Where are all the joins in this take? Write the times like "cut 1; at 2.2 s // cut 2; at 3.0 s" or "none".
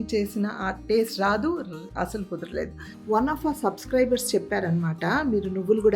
cut 1; at 2.9 s